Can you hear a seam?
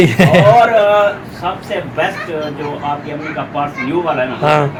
no; 0 cuts

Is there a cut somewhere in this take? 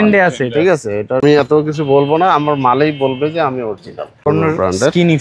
yes; 2 cuts; at 1.2 s, 4.3 s

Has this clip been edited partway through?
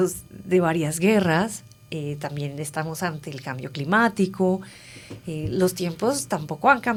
no; 0 cuts

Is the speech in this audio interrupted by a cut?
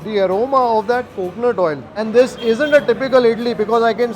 yes; 1 cut; at 1.9 s

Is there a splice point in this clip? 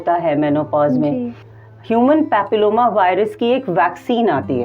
yes; 1 cut; at 1.4 s

